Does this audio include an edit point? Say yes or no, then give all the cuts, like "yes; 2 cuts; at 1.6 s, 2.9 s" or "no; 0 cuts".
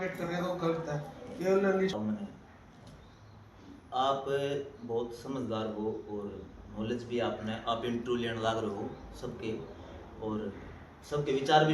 yes; 1 cut; at 1.9 s